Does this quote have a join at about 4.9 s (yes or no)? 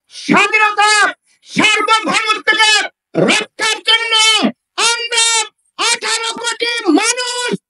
no